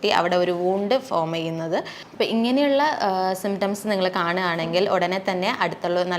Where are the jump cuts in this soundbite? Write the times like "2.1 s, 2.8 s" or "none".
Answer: 2.0 s

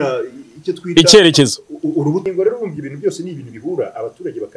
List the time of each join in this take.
2.2 s

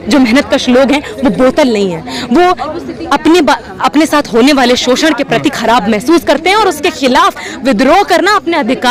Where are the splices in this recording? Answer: none

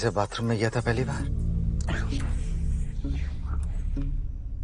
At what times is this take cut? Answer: 1.3 s

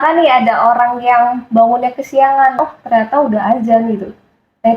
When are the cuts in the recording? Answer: 2.6 s

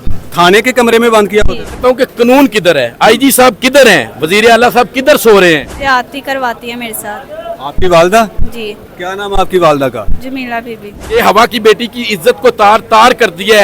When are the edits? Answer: 1.8 s, 5.7 s, 11.0 s

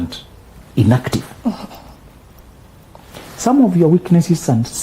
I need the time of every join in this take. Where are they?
none

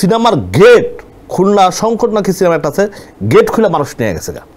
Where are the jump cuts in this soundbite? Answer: none

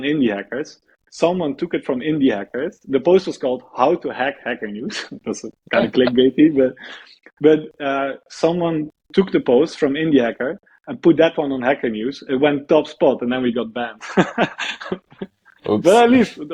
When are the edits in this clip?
none

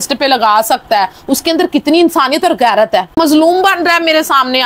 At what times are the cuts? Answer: 3.2 s

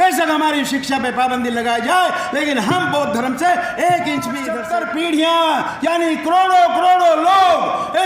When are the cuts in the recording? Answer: 4.5 s

